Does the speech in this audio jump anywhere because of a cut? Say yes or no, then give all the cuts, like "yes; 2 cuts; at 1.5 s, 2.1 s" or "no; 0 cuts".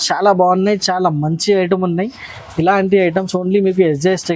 no; 0 cuts